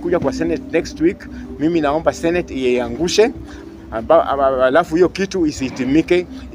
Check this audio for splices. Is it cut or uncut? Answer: uncut